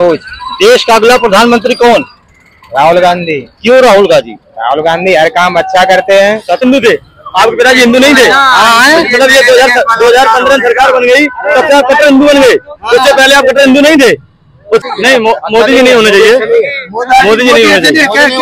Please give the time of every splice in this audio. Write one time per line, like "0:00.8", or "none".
0:06.6
0:14.8